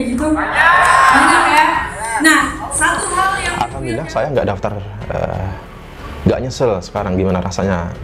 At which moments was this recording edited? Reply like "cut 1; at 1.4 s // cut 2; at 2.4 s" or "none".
cut 1; at 3.5 s

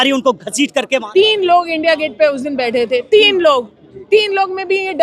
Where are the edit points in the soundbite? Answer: cut 1; at 1.1 s

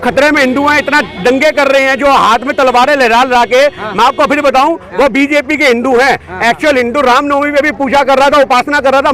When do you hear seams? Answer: none

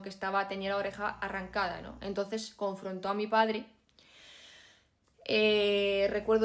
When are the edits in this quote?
none

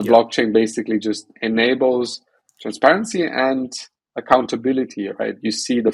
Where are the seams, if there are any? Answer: none

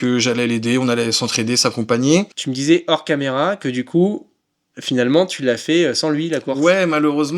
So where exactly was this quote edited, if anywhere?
cut 1; at 2.4 s

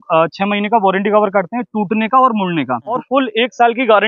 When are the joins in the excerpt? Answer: cut 1; at 3.0 s

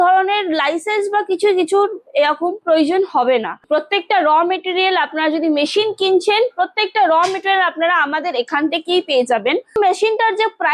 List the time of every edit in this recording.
cut 1; at 3.6 s // cut 2; at 9.8 s

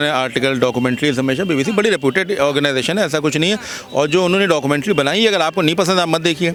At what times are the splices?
none

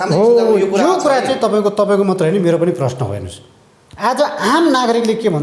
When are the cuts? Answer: none

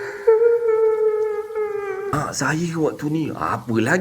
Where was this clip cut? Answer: cut 1; at 2.1 s

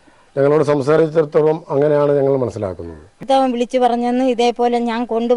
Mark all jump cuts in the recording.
cut 1; at 3.2 s

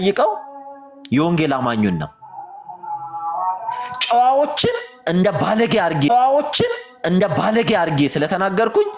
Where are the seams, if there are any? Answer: none

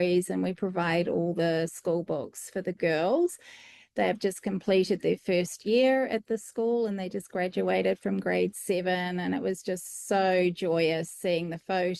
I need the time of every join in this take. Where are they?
none

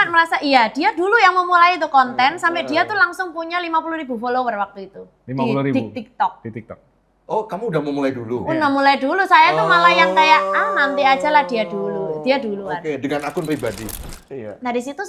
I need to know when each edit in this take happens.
cut 1; at 13.9 s

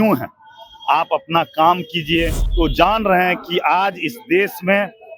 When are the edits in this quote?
cut 1; at 2.4 s

